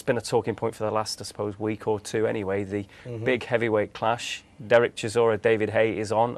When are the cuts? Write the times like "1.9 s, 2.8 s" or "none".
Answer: 3.5 s